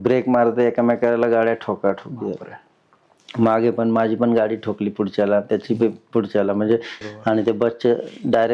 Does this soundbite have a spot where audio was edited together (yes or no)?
yes